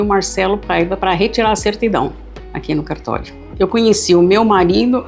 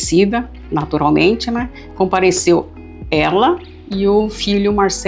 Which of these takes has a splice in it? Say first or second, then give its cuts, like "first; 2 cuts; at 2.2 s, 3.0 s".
first; 1 cut; at 3.3 s